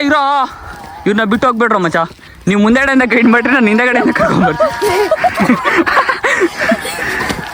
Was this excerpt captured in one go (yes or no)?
no